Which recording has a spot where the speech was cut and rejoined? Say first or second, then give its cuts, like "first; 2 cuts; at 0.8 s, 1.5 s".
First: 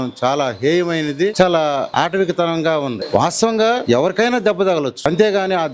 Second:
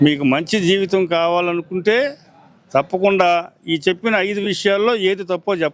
first; 5 cuts; at 1.3 s, 1.9 s, 3.0 s, 3.8 s, 5.0 s